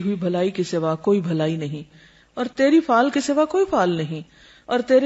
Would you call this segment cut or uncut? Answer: uncut